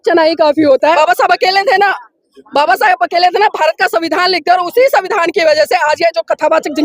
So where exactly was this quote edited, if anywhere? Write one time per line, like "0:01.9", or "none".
0:00.9